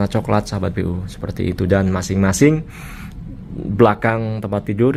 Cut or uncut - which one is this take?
uncut